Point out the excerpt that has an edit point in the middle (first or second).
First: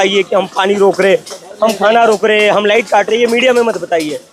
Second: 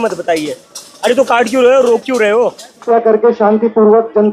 second